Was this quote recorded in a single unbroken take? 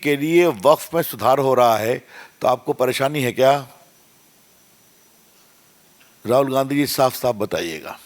yes; 0 cuts

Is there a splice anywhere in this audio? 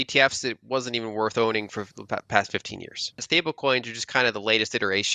yes; 1 cut; at 3.2 s

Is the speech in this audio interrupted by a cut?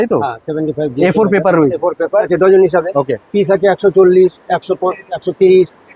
yes; 1 cut; at 2.3 s

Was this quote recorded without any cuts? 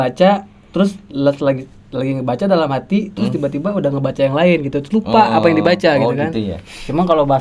yes; 0 cuts

